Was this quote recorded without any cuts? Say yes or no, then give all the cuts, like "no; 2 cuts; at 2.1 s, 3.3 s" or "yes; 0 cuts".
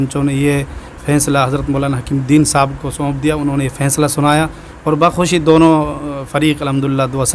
yes; 0 cuts